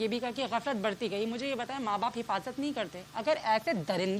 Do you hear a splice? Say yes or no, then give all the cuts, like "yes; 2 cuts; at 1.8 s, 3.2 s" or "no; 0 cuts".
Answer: no; 0 cuts